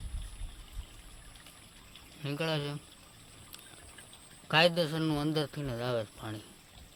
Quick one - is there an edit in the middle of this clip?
no; 0 cuts

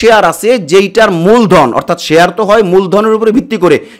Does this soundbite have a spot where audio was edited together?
no; 0 cuts

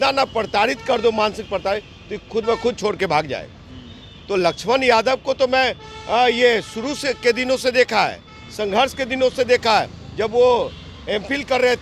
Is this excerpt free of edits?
yes; 0 cuts

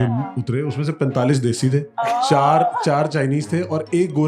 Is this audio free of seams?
no; 1 cut; at 1.9 s

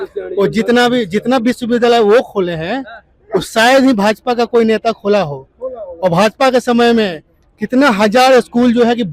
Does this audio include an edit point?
no; 0 cuts

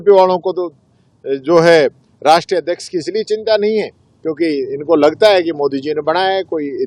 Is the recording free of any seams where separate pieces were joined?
yes; 0 cuts

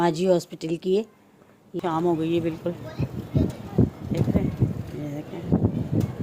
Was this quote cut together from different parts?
yes; 1 cut; at 1.6 s

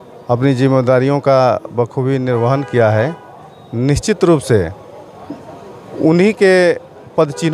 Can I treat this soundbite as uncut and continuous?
yes; 0 cuts

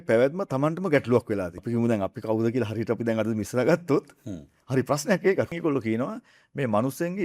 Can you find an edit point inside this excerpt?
yes; 2 cuts; at 1.6 s, 5.5 s

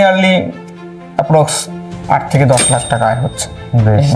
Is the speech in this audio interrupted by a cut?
no; 0 cuts

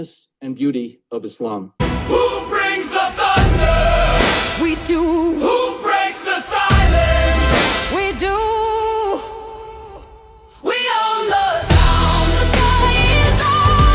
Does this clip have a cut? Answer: yes; 1 cut; at 1.7 s

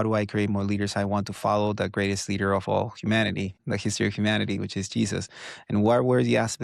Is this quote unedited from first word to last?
yes; 0 cuts

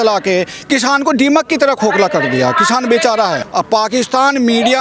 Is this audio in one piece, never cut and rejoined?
no; 1 cut; at 3.4 s

